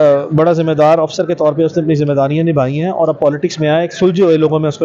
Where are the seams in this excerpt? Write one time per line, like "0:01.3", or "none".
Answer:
none